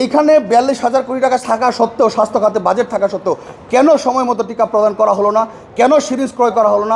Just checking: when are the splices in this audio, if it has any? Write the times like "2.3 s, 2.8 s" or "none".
none